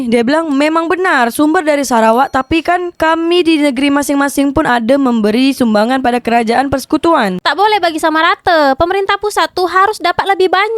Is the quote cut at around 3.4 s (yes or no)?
no